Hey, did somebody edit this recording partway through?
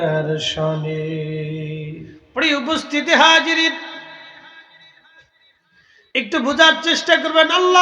yes; 1 cut; at 2.2 s

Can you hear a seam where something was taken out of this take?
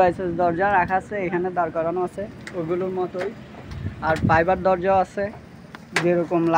no; 0 cuts

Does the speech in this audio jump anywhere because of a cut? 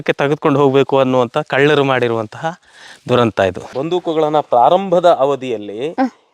yes; 1 cut; at 3.7 s

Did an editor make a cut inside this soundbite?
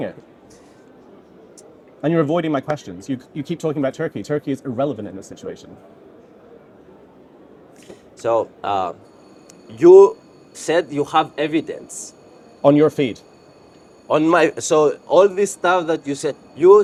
no; 0 cuts

